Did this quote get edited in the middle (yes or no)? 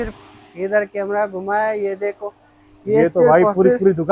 no